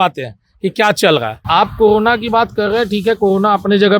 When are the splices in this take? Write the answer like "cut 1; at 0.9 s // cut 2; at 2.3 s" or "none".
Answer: cut 1; at 1.3 s